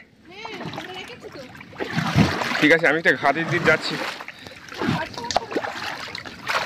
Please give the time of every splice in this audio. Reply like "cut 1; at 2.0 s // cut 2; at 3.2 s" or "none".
cut 1; at 5.0 s